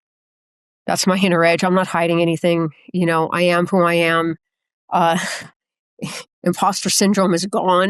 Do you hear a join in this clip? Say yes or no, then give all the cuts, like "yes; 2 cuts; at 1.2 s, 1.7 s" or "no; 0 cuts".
no; 0 cuts